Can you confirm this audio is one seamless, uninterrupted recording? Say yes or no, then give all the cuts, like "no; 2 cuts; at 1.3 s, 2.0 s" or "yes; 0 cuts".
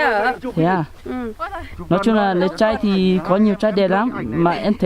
yes; 0 cuts